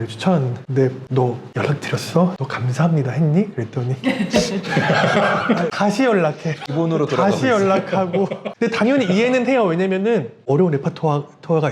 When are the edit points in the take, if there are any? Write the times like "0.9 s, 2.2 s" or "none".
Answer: none